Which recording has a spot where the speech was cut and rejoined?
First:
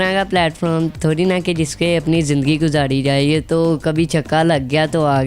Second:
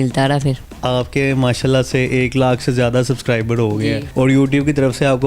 second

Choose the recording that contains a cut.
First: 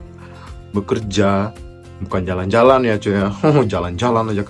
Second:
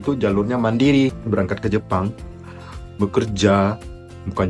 second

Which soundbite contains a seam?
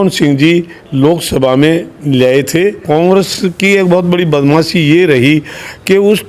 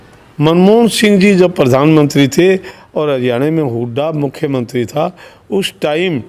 first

